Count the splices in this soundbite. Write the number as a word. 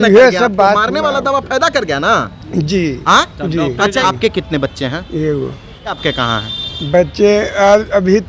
two